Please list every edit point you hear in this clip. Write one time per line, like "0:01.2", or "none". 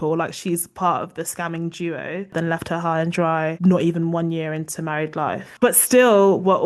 0:02.3
0:03.6
0:05.5

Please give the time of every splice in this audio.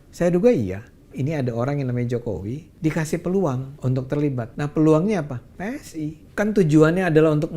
0:01.1
0:02.6
0:03.7
0:04.5
0:06.2

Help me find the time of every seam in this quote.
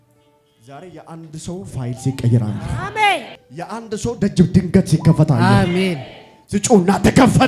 none

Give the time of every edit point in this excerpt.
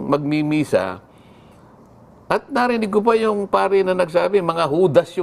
none

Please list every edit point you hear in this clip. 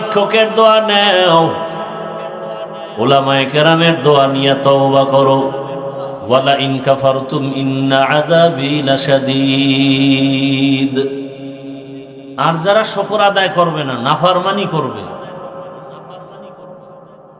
0:06.1

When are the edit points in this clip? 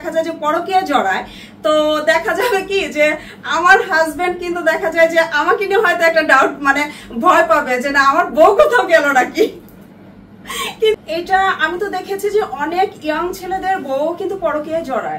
0:11.0

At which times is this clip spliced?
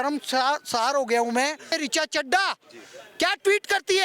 0:01.7

